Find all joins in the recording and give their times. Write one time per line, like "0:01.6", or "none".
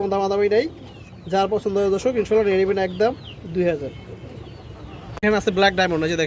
none